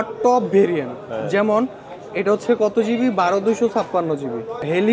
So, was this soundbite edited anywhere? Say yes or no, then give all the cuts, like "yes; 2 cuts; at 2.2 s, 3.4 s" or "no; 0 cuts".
no; 0 cuts